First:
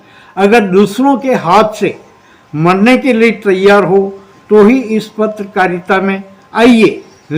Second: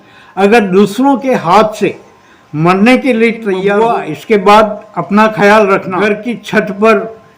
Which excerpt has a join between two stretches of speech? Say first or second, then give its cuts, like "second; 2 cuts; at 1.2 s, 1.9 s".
second; 2 cuts; at 3.7 s, 6.0 s